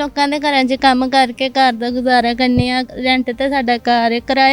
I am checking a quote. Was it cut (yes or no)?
no